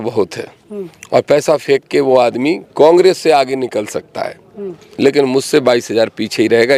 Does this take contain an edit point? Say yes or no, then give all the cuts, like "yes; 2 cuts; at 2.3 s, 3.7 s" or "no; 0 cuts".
no; 0 cuts